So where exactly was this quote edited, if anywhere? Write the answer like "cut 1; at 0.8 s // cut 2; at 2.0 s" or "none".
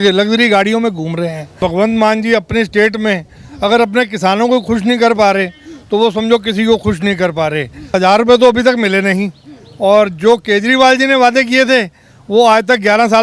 cut 1; at 1.6 s // cut 2; at 7.9 s